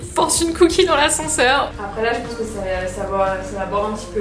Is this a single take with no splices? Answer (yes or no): no